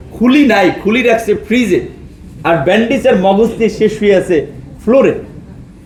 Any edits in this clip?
no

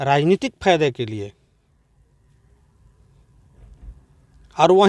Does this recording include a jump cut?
no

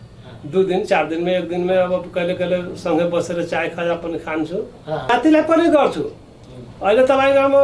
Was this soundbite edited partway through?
yes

